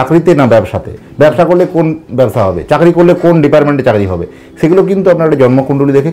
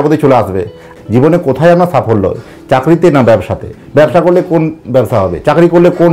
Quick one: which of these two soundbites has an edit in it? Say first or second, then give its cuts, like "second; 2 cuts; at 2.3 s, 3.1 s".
second; 1 cut; at 0.9 s